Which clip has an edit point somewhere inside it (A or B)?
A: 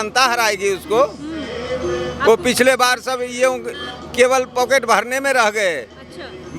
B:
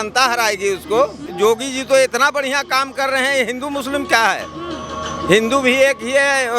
B